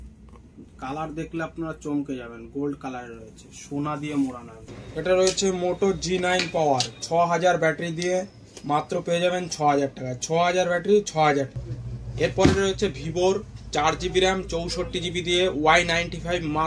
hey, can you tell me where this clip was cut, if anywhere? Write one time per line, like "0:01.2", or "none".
0:04.8
0:11.6